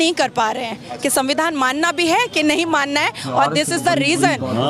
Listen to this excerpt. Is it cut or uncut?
uncut